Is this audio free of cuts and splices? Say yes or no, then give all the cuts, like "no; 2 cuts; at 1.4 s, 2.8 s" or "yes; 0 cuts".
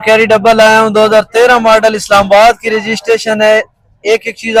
yes; 0 cuts